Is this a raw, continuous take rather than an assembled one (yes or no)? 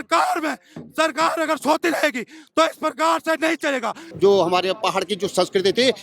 no